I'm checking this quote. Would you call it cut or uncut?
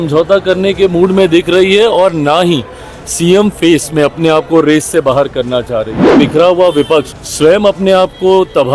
cut